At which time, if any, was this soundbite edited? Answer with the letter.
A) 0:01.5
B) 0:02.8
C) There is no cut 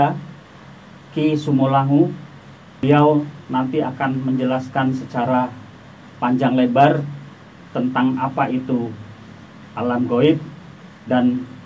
B